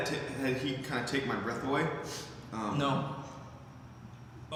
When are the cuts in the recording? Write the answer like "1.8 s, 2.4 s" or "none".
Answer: none